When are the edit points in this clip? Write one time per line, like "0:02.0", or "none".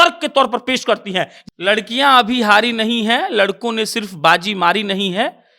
0:01.4